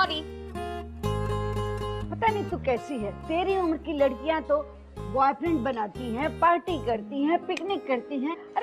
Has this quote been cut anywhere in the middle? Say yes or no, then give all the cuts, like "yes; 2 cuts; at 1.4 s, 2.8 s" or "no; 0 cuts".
yes; 1 cut; at 6.3 s